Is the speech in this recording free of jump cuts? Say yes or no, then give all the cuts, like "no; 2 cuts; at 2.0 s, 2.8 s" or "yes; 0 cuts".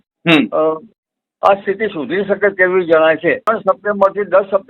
no; 1 cut; at 3.5 s